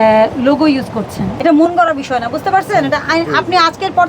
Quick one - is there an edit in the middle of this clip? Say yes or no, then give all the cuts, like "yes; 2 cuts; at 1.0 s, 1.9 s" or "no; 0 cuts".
yes; 1 cut; at 1.3 s